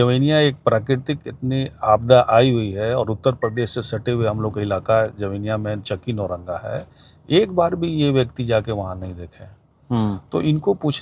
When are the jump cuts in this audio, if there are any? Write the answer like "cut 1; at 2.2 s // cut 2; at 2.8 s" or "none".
none